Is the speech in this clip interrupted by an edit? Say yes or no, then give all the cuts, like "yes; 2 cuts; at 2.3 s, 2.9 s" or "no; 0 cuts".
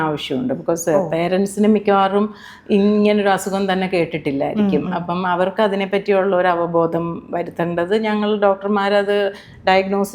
no; 0 cuts